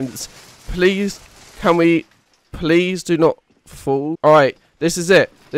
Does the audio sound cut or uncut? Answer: uncut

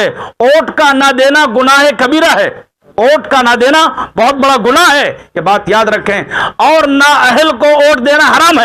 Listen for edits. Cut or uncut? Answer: uncut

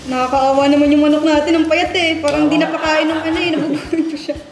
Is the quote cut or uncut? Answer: uncut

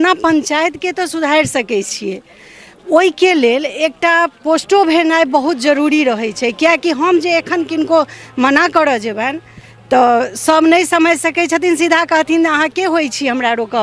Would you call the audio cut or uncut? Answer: uncut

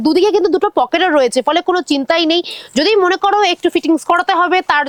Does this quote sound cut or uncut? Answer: uncut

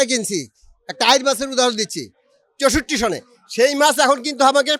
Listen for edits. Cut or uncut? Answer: uncut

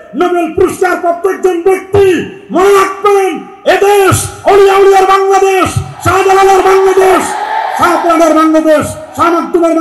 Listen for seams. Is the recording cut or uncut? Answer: uncut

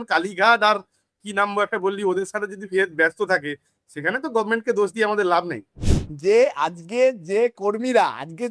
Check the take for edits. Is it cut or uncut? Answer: cut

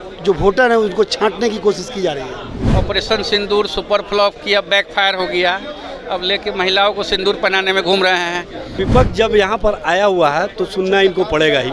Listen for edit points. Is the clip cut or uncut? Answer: cut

